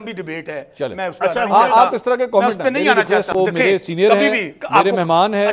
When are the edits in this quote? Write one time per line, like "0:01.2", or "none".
0:03.3